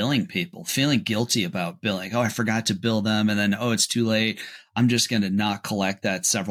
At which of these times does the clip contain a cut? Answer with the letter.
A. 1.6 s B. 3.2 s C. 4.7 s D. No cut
D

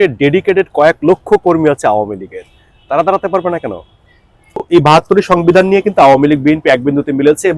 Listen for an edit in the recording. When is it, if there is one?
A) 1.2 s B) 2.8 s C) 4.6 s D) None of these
C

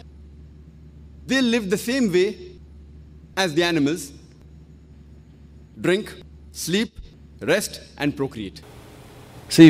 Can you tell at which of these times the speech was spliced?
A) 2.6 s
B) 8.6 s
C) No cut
B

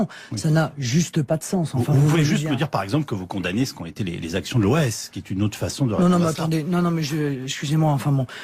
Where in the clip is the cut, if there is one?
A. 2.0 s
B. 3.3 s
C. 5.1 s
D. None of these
C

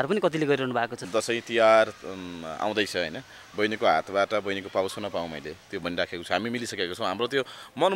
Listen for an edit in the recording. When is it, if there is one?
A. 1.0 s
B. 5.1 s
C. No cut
A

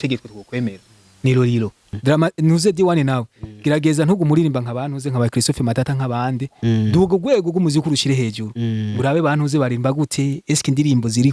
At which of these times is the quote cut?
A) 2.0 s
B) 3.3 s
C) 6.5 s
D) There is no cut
A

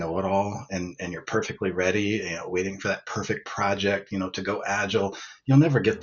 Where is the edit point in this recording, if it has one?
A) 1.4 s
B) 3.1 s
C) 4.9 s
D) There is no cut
D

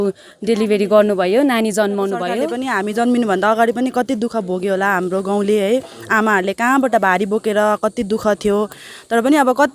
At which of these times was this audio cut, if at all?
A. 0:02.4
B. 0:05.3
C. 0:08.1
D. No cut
A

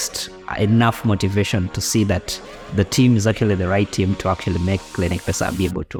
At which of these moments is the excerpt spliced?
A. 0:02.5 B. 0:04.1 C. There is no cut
C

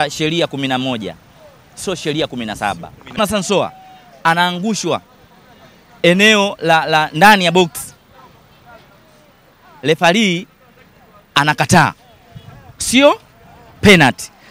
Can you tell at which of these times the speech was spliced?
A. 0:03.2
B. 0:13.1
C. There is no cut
A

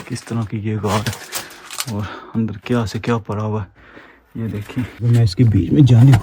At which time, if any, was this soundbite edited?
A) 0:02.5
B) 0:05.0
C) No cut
B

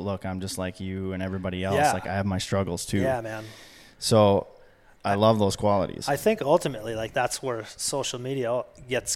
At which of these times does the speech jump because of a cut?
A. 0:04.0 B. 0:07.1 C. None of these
B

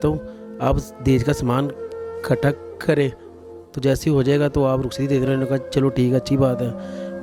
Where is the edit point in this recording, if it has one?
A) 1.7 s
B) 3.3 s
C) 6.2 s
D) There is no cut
D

